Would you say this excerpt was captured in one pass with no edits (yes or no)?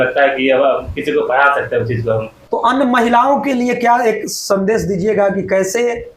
no